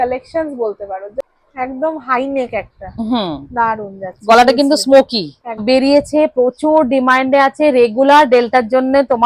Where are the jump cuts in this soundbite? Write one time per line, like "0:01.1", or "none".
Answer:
0:01.2
0:05.6